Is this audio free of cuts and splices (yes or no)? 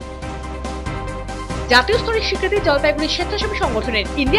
no